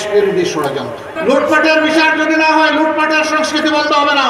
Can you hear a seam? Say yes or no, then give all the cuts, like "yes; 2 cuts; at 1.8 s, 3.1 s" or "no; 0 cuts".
yes; 1 cut; at 1.1 s